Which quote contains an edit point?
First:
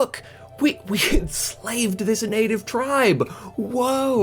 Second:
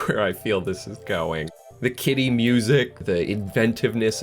second; 1 cut; at 3.0 s

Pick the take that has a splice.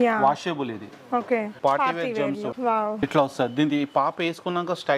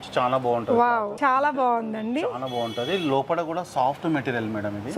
first; 1 cut; at 1.6 s

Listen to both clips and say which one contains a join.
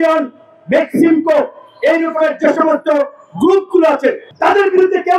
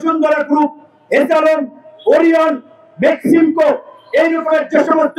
first; 1 cut; at 4.2 s

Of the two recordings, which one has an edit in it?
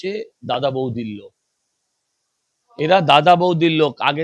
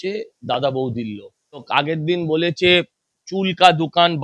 second; 1 cut; at 1.7 s

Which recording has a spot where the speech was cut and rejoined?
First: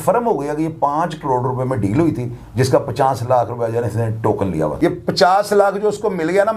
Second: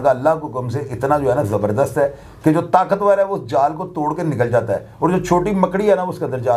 first; 1 cut; at 4.7 s

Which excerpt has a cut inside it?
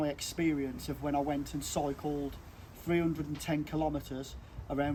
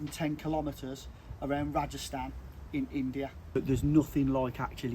second; 1 cut; at 3.6 s

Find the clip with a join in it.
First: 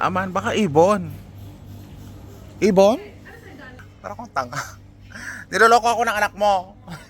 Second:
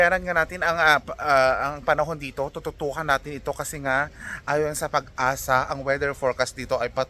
first; 1 cut; at 3.9 s

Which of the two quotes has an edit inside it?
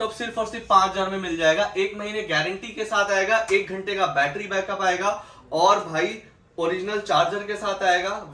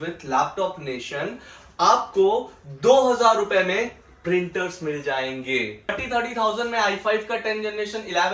second; 1 cut; at 6.0 s

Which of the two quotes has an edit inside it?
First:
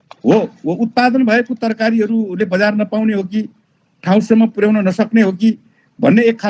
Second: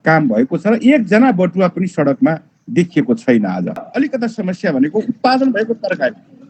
second; 1 cut; at 3.9 s

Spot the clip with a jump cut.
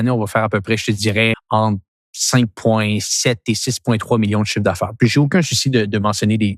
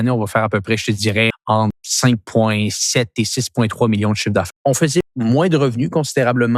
second; 2 cuts; at 1.5 s, 4.8 s

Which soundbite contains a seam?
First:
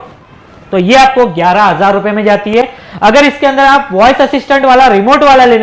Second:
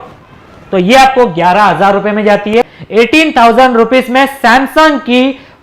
second; 1 cut; at 2.8 s

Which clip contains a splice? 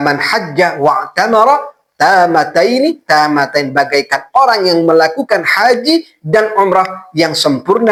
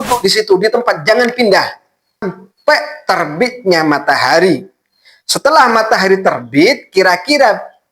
second; 1 cut; at 2.2 s

